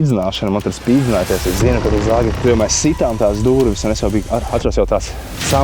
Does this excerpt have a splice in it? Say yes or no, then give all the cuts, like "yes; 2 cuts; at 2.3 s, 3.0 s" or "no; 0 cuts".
yes; 1 cut; at 2.4 s